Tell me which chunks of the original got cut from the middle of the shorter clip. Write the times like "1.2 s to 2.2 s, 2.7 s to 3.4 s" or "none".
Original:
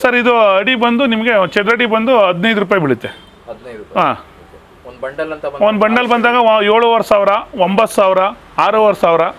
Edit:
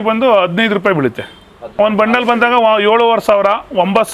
3.5 s to 5.4 s